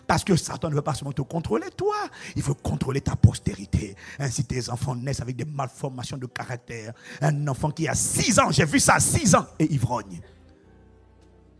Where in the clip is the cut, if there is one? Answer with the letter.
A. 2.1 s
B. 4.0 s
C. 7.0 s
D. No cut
D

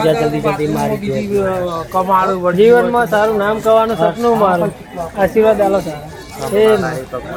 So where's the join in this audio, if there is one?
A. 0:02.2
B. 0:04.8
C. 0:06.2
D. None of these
D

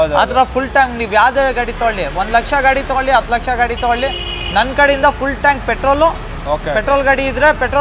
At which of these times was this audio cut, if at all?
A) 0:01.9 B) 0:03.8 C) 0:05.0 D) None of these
D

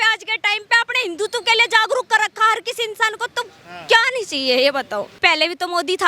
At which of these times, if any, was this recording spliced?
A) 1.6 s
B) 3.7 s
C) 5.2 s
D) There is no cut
C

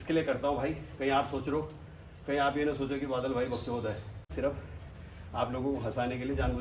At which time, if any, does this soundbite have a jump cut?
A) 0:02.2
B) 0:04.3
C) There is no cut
B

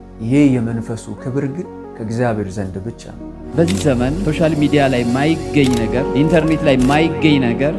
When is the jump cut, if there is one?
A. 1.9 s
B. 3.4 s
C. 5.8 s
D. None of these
B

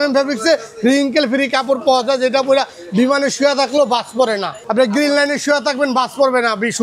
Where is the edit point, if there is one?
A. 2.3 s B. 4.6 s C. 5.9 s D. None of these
B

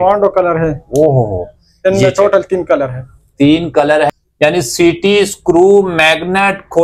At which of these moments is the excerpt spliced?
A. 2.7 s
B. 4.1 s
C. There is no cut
B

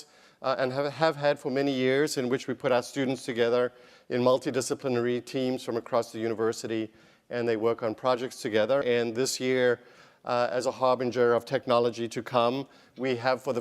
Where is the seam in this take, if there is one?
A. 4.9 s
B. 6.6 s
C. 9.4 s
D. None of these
B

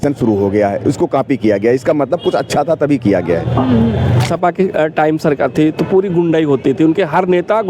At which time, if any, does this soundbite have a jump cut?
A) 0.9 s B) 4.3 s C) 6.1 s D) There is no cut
B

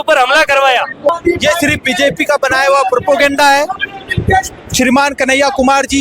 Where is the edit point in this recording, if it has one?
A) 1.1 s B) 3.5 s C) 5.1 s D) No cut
A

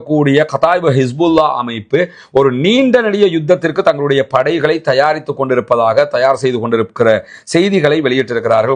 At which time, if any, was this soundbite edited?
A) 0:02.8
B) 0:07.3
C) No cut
C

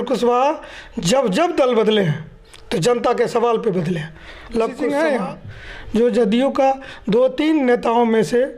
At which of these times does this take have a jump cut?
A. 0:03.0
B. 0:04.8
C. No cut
B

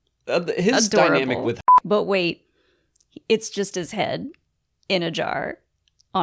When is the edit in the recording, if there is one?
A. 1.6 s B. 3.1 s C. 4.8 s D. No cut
A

